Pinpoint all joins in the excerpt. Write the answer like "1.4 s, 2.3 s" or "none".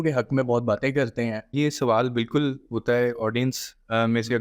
1.5 s